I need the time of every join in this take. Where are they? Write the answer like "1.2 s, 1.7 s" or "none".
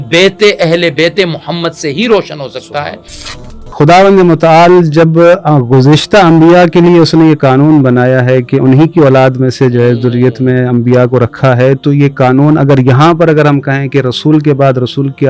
3.5 s

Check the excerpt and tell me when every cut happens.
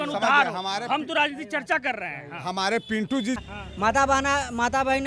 3.4 s

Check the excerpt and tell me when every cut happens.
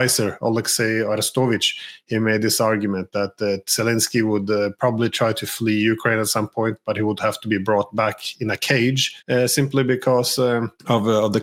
none

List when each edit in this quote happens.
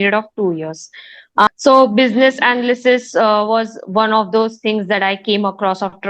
1.5 s

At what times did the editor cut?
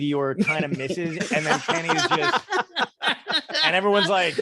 none

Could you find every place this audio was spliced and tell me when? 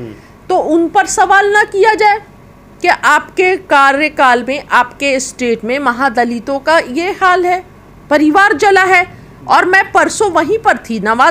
none

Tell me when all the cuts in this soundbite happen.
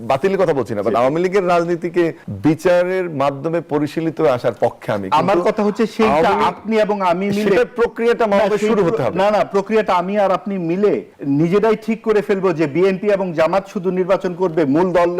2.2 s, 11.1 s

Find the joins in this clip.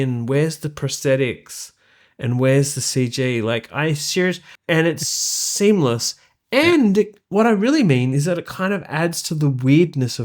4.5 s

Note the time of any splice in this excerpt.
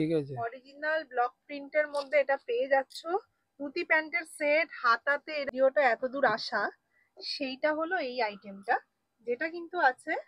5.5 s

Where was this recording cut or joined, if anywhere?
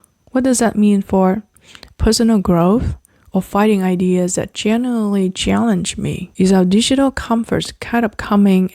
1.9 s, 6.2 s

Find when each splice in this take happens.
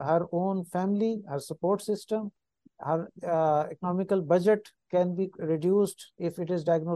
none

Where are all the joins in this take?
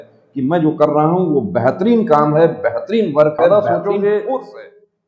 3.5 s

